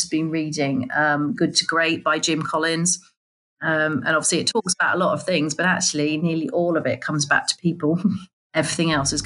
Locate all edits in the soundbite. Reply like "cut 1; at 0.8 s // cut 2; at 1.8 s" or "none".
cut 1; at 8.3 s